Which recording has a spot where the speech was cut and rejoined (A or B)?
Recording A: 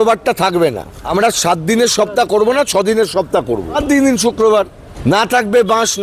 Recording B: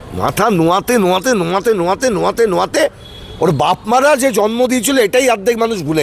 A